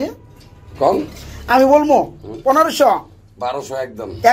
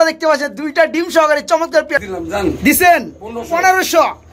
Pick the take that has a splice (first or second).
second